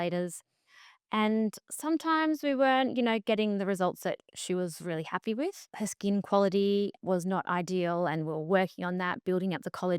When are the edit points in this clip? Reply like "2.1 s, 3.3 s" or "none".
5.7 s, 7.0 s